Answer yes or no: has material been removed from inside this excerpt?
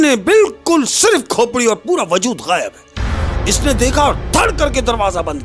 no